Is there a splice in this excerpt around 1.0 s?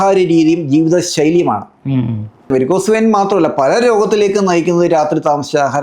no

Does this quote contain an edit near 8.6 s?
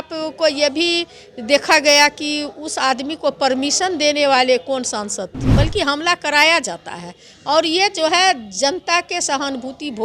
no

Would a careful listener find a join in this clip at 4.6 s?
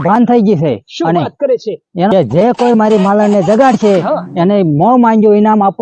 no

